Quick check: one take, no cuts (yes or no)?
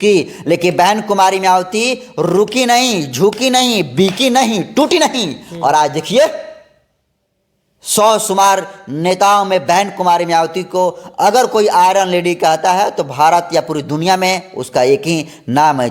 yes